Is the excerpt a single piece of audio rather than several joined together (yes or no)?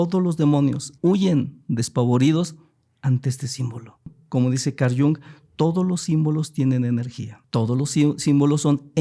no